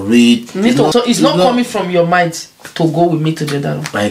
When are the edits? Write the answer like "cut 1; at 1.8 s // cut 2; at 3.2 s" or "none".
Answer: cut 1; at 0.9 s